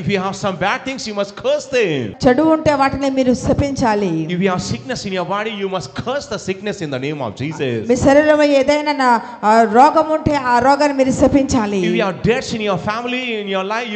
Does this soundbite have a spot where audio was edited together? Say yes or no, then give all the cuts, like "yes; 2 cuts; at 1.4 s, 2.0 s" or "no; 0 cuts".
yes; 1 cut; at 2.1 s